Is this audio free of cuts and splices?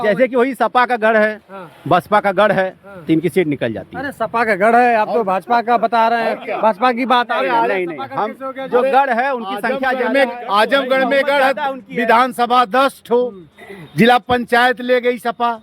yes; 0 cuts

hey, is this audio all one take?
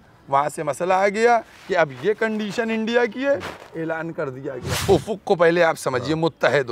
no; 1 cut; at 4.7 s

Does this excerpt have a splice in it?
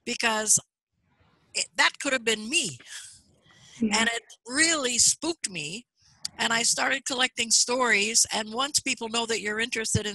no; 0 cuts

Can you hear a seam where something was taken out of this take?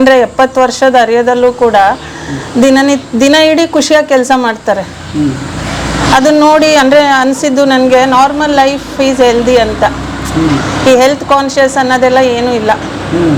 no; 0 cuts

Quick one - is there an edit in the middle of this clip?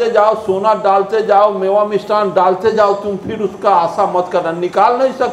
no; 0 cuts

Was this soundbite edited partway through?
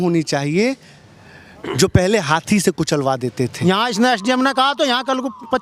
yes; 1 cut; at 3.5 s

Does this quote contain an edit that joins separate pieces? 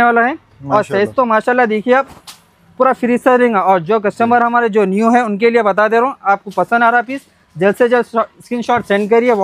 no; 0 cuts

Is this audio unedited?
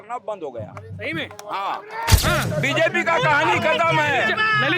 no; 1 cut; at 2.2 s

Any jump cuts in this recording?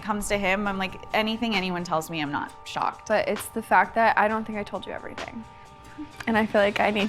yes; 1 cut; at 3.0 s

